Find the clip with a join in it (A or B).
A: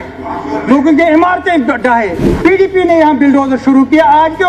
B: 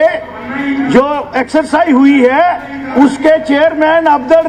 A